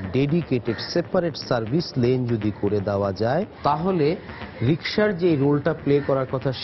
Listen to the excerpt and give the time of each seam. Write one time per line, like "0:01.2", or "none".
0:03.5